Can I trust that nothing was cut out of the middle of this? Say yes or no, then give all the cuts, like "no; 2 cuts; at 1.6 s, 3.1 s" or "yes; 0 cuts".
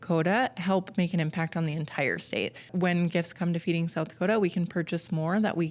no; 1 cut; at 2.7 s